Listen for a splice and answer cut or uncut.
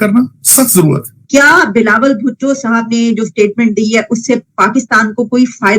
cut